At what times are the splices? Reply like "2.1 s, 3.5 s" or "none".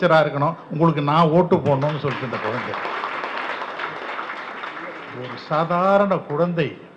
none